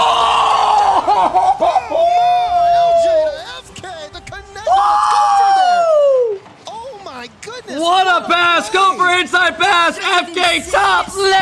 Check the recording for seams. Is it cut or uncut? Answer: uncut